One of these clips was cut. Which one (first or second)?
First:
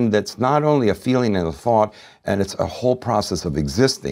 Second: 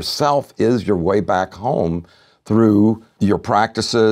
second